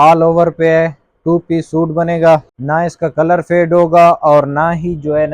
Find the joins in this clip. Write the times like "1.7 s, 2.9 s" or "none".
2.5 s